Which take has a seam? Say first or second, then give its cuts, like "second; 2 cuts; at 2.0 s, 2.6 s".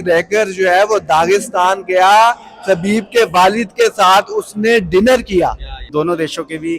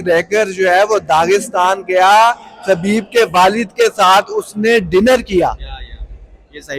first; 1 cut; at 5.8 s